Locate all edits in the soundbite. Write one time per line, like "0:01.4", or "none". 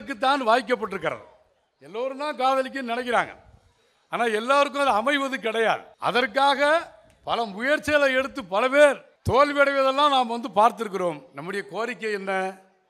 0:05.9
0:09.1